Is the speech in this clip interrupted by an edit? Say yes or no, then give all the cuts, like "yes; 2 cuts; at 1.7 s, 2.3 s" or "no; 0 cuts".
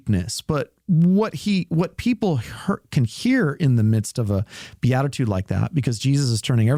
no; 0 cuts